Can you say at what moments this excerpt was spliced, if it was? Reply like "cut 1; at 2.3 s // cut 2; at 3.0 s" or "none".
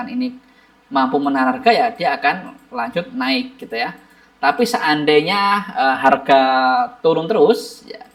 none